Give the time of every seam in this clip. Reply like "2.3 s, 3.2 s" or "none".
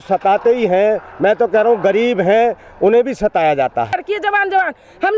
3.9 s